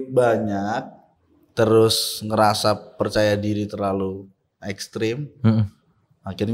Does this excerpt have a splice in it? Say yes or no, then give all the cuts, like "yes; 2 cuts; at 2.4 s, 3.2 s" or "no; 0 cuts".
no; 0 cuts